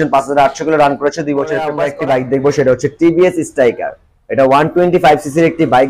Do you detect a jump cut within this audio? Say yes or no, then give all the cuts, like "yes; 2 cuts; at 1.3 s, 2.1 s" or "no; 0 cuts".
yes; 1 cut; at 1.8 s